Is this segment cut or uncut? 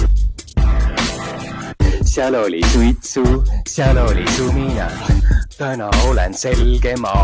cut